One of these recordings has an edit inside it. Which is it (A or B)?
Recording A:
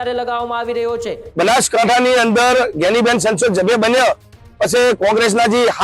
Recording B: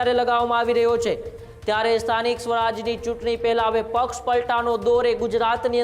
A